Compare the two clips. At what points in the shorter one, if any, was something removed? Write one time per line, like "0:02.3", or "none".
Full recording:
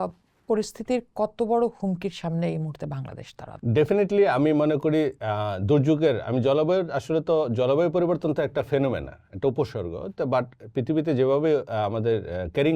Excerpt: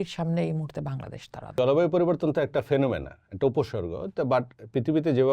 0:01.5